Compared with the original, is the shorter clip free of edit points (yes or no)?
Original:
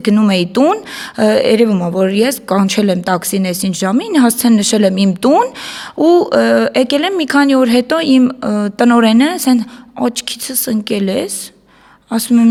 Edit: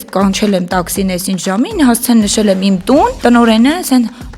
no